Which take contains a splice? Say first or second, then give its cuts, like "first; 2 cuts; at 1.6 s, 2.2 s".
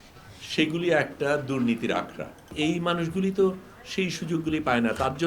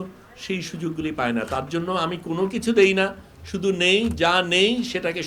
first; 1 cut; at 2.5 s